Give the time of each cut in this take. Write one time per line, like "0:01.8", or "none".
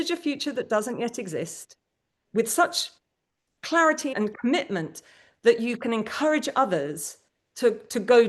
0:02.2
0:04.1